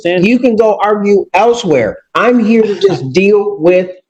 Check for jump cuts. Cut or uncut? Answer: uncut